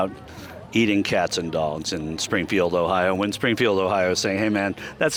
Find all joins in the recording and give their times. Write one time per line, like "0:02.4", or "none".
none